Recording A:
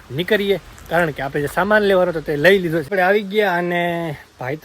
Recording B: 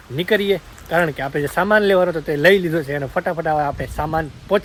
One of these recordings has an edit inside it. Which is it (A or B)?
A